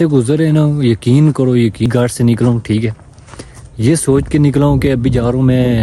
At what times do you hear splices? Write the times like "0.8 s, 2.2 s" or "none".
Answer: 1.9 s